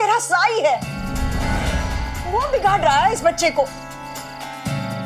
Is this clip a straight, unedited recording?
no; 1 cut; at 1.1 s

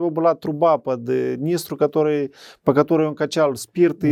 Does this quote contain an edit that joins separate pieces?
no; 0 cuts

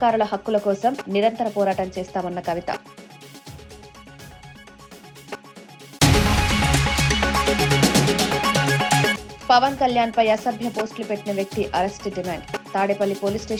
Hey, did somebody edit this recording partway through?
no; 0 cuts

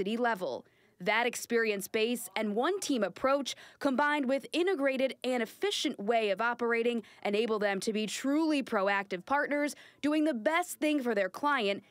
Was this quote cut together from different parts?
no; 0 cuts

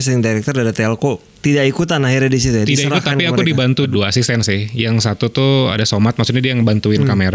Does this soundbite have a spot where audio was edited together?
yes; 1 cut; at 3.9 s

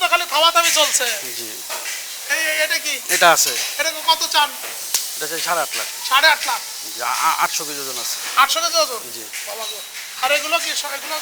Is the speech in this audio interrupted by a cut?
no; 0 cuts

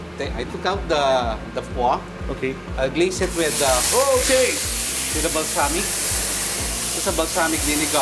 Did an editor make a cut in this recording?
no; 0 cuts

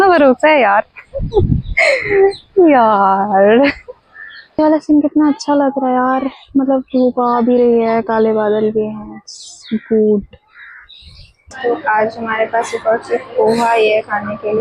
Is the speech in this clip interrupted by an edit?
yes; 2 cuts; at 4.5 s, 11.5 s

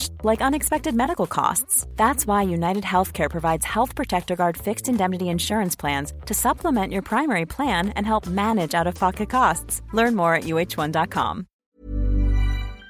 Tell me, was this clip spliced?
yes; 1 cut; at 11.5 s

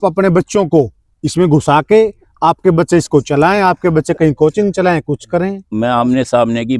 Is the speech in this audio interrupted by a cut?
yes; 1 cut; at 5.6 s

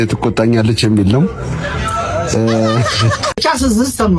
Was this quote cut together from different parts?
no; 0 cuts

